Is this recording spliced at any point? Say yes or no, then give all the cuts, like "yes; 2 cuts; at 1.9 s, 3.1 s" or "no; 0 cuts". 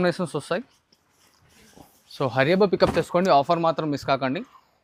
no; 0 cuts